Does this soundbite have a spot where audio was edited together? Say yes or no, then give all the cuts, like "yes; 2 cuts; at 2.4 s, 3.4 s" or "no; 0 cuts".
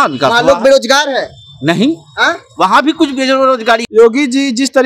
yes; 1 cut; at 3.8 s